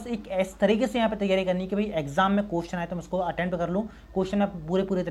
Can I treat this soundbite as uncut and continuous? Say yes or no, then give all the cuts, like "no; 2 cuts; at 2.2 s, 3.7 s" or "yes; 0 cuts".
yes; 0 cuts